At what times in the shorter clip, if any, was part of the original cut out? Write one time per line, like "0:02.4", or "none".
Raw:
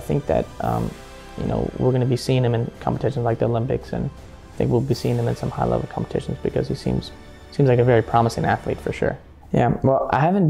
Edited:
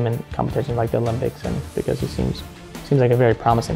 0:01.7